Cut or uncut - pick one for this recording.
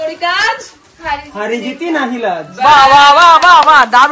uncut